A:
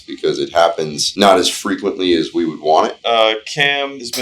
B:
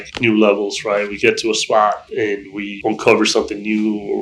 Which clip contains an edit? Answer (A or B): A